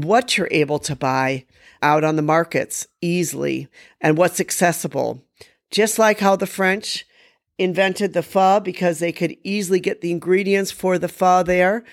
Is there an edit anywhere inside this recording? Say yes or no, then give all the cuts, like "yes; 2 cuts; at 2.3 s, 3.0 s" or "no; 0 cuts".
no; 0 cuts